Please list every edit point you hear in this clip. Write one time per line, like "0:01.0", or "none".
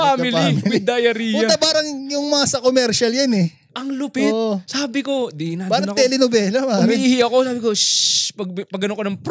none

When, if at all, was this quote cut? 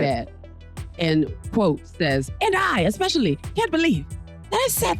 0:02.3

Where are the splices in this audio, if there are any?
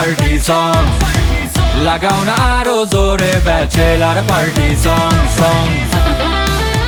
none

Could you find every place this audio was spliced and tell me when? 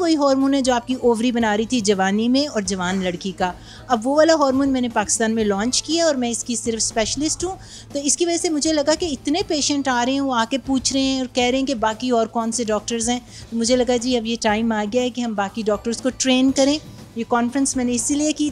none

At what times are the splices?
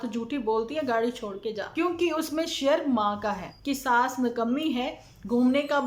0:01.6
0:03.5

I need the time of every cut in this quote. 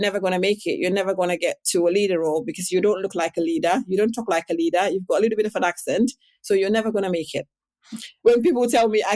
0:08.0

